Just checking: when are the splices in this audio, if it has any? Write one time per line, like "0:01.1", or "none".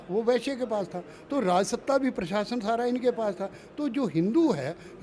none